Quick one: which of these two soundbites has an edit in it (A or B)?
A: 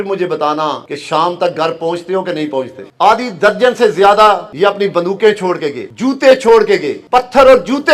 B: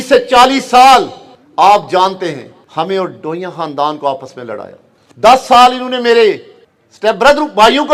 A